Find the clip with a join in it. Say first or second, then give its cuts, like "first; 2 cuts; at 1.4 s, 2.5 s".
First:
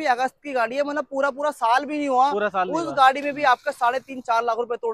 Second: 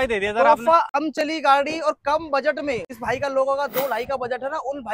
second; 2 cuts; at 1.0 s, 2.9 s